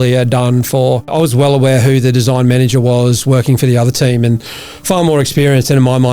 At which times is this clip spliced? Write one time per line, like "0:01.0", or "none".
0:01.1